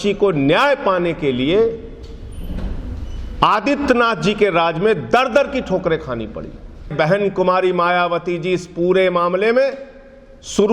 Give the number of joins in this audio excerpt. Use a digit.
1